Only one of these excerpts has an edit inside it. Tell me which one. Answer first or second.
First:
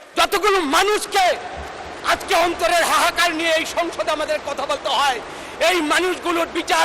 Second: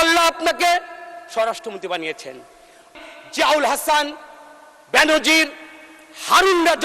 second